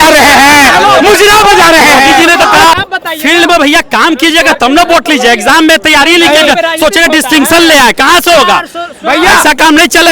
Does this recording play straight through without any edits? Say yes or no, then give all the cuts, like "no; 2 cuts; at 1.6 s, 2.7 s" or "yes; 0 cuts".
no; 1 cut; at 2.7 s